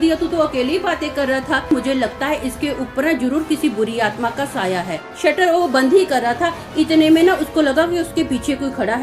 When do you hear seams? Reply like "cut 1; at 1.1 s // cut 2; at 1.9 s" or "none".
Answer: cut 1; at 1.6 s // cut 2; at 5.1 s